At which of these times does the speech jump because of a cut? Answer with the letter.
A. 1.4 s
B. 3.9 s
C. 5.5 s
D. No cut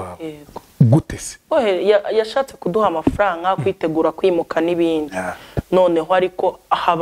A